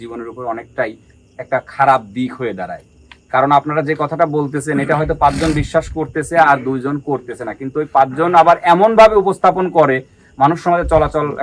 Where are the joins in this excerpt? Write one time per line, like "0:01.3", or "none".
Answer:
none